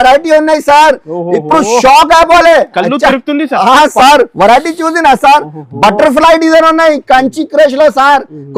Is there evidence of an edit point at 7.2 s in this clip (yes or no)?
no